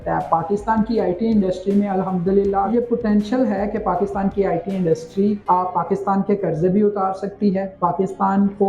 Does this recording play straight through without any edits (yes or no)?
no